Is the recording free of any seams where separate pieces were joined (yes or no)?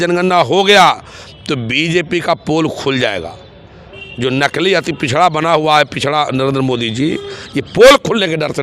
yes